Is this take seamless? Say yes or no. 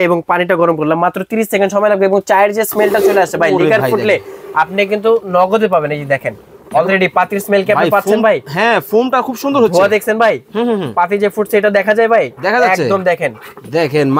yes